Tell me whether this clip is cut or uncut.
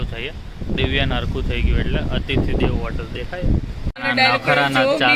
cut